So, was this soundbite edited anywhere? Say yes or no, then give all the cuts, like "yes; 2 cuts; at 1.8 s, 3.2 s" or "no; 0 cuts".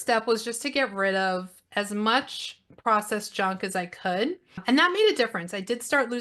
yes; 1 cut; at 4.5 s